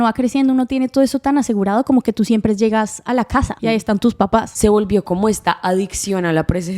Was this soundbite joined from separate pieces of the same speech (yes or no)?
yes